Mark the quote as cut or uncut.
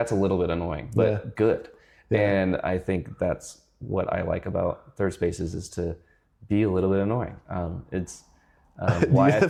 uncut